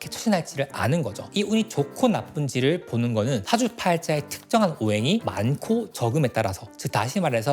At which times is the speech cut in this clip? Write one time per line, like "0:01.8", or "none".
0:01.3